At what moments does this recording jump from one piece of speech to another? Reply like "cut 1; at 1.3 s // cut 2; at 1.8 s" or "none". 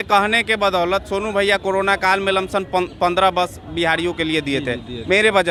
none